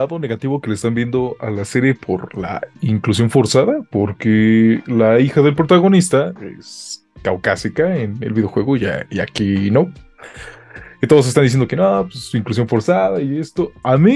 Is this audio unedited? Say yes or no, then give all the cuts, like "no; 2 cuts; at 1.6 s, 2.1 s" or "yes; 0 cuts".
yes; 0 cuts